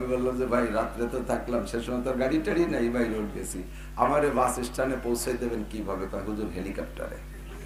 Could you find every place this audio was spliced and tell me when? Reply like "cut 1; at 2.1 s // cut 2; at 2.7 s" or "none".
none